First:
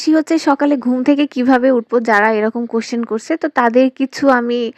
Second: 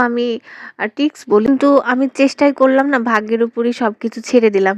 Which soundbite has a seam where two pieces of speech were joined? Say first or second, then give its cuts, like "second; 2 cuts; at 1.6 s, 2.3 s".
second; 1 cut; at 1.4 s